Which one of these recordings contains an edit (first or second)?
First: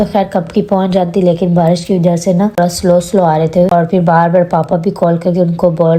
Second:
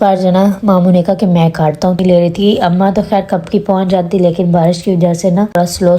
second